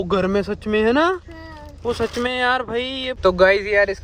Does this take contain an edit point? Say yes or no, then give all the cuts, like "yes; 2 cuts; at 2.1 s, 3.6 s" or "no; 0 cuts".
yes; 1 cut; at 3.0 s